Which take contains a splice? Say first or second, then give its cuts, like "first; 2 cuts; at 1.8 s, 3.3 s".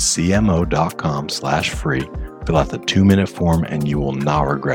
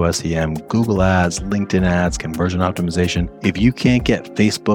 second; 1 cut; at 3.3 s